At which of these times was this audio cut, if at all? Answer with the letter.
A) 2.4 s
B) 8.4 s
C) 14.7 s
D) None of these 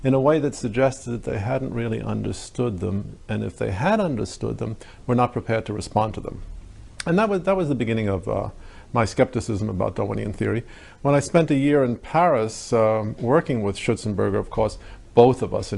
D